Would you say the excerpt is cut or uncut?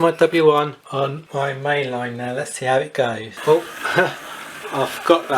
cut